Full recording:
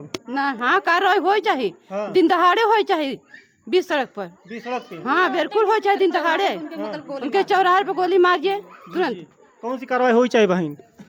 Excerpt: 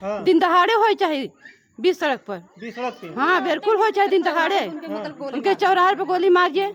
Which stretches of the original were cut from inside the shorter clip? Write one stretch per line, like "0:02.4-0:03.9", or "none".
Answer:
none